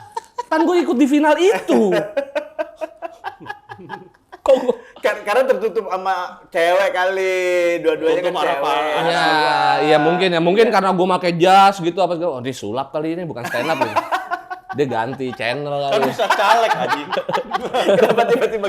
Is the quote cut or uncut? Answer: uncut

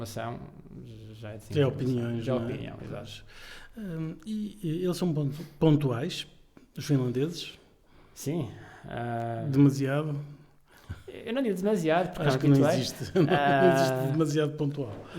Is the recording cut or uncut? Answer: uncut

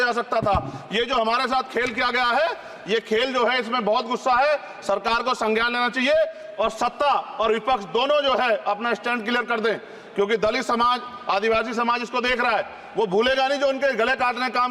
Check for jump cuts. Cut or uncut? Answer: uncut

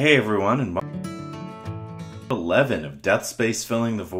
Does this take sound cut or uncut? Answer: cut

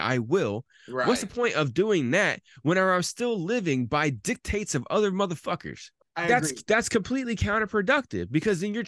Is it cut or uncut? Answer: cut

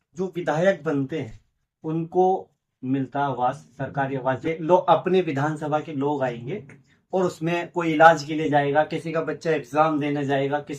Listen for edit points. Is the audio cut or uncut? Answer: cut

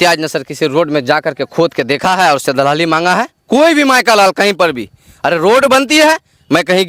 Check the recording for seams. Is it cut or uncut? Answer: uncut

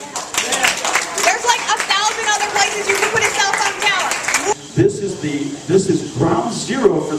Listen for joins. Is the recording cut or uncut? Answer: cut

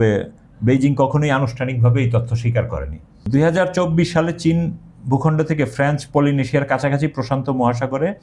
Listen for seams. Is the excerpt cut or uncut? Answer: cut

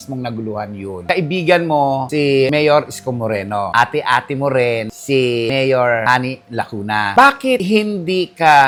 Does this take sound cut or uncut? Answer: uncut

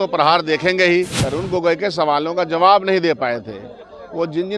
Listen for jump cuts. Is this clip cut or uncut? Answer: cut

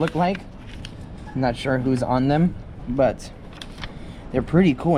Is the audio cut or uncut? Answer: uncut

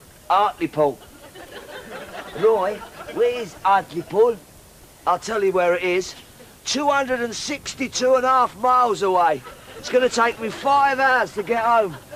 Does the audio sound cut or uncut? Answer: uncut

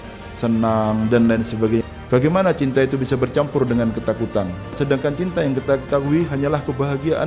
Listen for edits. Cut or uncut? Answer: cut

